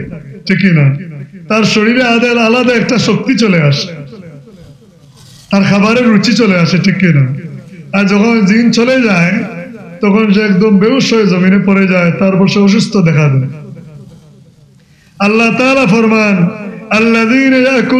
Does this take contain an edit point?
no; 0 cuts

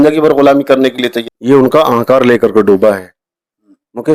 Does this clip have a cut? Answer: yes; 1 cut; at 1.2 s

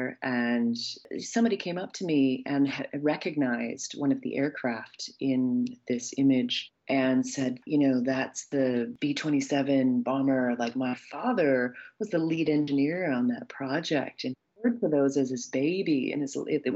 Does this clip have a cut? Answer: yes; 1 cut; at 1.1 s

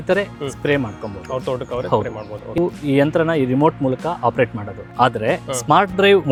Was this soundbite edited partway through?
no; 0 cuts

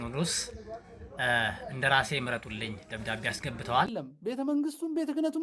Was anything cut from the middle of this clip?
yes; 1 cut; at 3.9 s

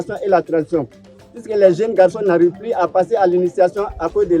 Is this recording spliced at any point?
no; 0 cuts

